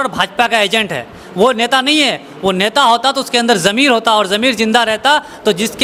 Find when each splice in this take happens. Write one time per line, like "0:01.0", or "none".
none